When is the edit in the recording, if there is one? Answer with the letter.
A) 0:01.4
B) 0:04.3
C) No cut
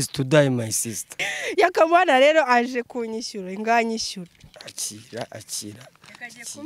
A